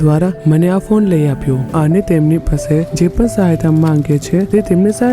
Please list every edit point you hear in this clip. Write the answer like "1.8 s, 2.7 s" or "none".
1.7 s